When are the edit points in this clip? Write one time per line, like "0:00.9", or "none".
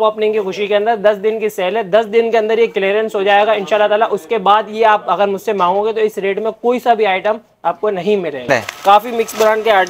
0:08.5